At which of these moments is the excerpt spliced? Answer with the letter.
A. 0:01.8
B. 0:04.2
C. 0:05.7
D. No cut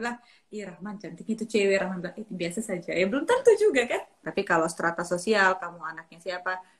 B